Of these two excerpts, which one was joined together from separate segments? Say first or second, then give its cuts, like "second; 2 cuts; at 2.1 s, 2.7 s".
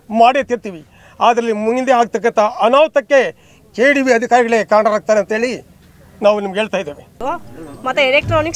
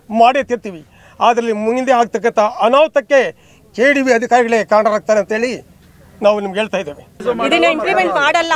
second; 1 cut; at 7.2 s